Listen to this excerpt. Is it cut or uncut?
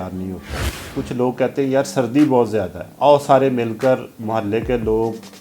cut